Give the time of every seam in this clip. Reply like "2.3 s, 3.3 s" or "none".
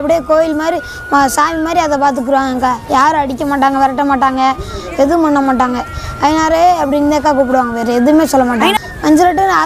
8.7 s